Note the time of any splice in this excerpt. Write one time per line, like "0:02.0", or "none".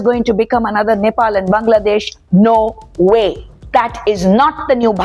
none